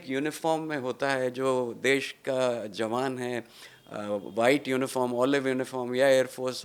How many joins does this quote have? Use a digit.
0